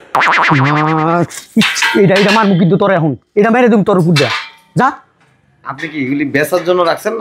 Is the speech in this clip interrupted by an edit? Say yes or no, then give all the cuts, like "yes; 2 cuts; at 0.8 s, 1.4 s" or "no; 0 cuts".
no; 0 cuts